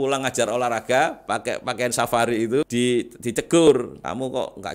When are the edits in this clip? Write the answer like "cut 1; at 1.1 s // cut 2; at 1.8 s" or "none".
cut 1; at 2.7 s // cut 2; at 3.7 s